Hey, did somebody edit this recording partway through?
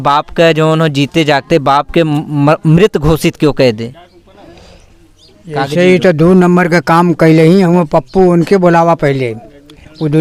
no; 0 cuts

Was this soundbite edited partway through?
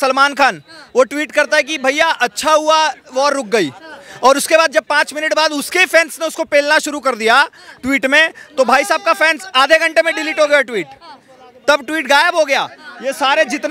no; 0 cuts

